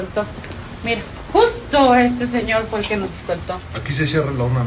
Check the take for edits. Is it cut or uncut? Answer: cut